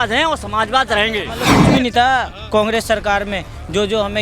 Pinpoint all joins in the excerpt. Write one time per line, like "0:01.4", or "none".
0:01.5